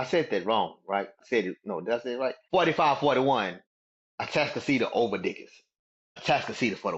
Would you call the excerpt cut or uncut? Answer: cut